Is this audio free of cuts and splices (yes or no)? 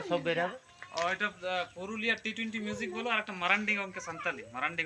yes